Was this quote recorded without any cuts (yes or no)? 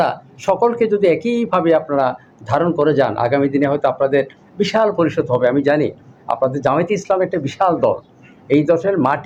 yes